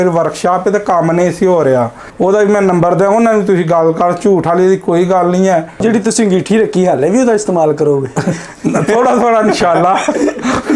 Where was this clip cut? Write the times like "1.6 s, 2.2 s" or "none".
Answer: 2.0 s, 5.8 s